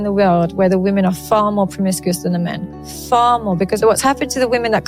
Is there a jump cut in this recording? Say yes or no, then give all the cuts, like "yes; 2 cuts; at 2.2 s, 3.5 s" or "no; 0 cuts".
yes; 1 cut; at 3.8 s